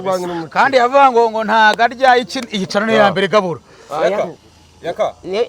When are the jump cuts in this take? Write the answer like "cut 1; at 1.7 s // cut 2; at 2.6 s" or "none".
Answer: none